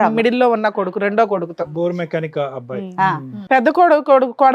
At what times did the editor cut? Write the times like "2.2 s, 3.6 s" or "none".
3.4 s